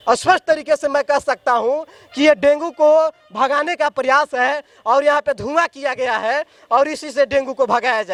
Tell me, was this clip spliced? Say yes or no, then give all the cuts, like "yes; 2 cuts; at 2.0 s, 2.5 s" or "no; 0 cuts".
no; 0 cuts